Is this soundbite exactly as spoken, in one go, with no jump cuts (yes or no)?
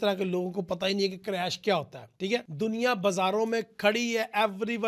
yes